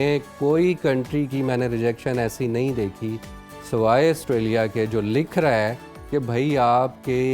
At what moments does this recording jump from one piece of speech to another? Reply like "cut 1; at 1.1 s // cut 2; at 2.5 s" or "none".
none